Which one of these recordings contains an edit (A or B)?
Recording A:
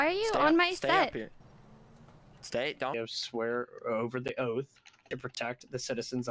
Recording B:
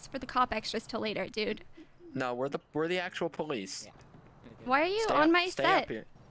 A